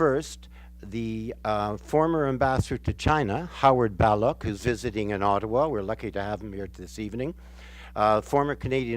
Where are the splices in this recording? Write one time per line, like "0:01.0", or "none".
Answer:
0:07.8